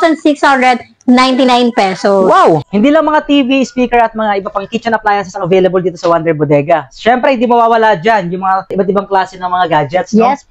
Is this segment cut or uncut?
cut